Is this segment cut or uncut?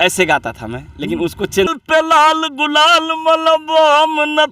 cut